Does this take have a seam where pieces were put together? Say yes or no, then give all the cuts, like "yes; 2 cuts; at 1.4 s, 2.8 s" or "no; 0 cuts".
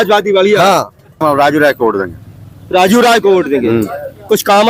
yes; 1 cut; at 1.2 s